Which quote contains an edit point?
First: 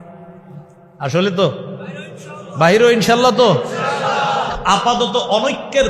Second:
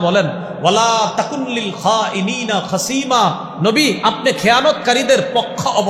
first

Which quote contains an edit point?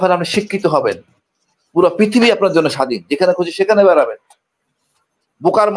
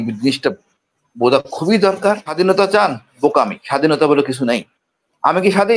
second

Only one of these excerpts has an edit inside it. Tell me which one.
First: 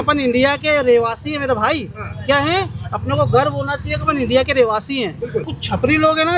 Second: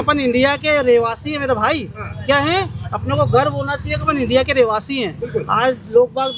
first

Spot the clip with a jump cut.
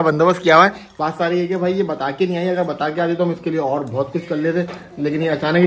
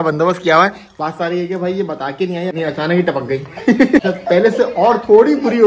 second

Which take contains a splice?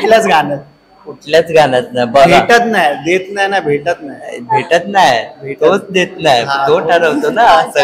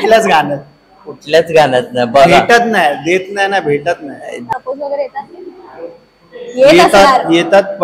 second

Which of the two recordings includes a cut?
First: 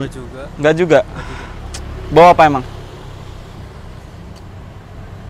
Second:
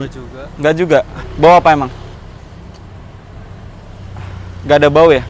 second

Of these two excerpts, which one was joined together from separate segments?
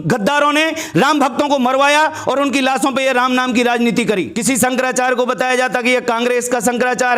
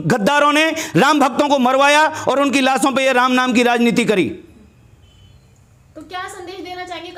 first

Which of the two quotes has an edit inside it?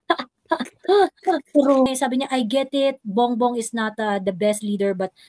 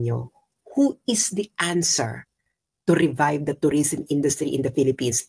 first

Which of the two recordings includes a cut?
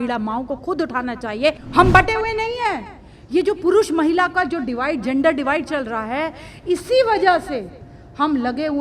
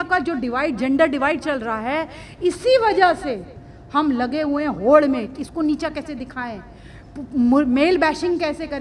first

